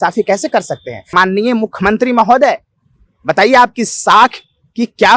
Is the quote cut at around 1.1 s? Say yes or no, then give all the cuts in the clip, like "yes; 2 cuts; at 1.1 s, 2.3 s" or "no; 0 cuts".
yes; 1 cut; at 1.1 s